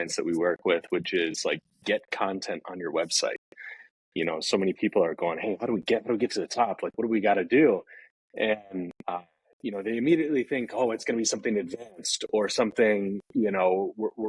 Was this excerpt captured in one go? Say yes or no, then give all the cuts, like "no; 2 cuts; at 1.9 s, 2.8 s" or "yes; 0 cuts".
yes; 0 cuts